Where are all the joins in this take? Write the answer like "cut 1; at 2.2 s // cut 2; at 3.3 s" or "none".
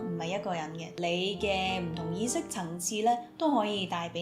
cut 1; at 0.9 s

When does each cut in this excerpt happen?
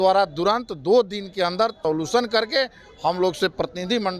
cut 1; at 1.8 s

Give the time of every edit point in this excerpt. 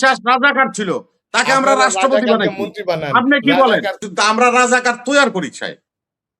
cut 1; at 3.9 s

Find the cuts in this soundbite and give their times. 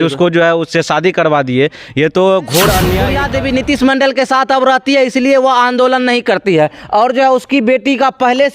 cut 1; at 3.1 s

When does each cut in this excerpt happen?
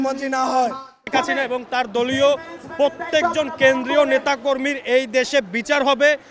cut 1; at 1.1 s

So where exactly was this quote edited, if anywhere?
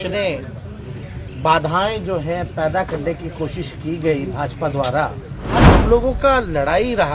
cut 1; at 5.8 s

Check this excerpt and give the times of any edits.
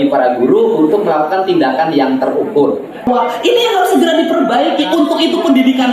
cut 1; at 3.1 s

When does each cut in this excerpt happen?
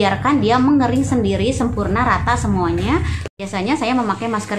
cut 1; at 3.3 s

